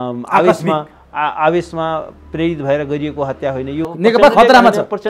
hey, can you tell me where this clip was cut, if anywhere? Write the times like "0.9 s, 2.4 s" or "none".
3.9 s